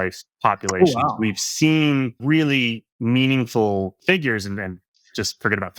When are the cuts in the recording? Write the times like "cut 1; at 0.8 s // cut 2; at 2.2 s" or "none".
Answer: cut 1; at 2.2 s // cut 2; at 4.0 s